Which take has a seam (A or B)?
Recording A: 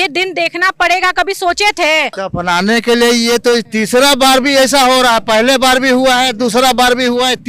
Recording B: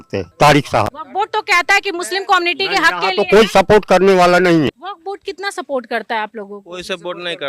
B